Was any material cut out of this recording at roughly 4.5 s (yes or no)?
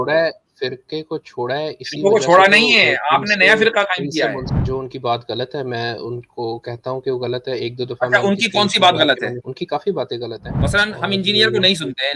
yes